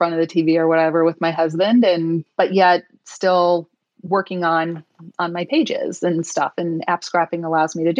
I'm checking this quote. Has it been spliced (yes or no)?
yes